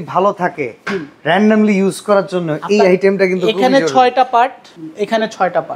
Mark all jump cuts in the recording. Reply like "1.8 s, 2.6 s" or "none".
4.7 s